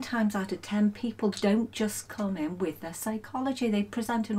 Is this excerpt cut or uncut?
uncut